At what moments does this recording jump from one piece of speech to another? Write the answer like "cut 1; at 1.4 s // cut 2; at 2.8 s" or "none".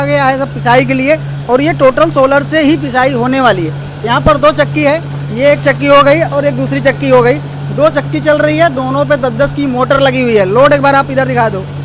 none